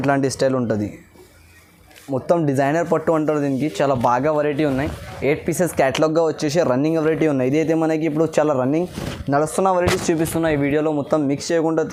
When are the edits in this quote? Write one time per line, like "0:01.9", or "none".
none